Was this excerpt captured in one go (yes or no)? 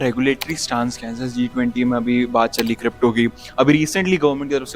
yes